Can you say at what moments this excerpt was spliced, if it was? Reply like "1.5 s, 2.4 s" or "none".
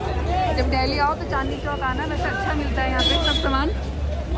none